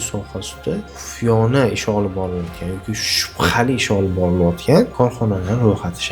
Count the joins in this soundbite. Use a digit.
2